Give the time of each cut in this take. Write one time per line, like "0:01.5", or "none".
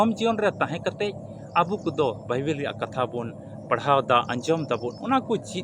none